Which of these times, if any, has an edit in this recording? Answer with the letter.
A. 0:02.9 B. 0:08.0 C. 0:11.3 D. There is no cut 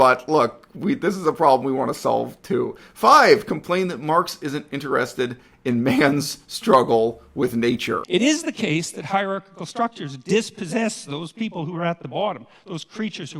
B